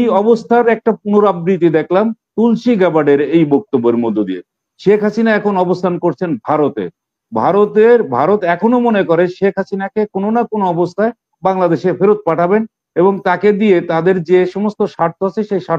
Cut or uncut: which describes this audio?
uncut